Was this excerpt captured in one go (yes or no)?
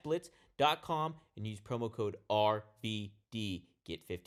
yes